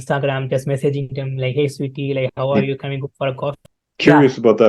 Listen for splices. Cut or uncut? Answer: cut